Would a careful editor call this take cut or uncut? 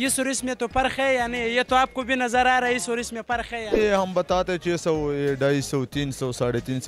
cut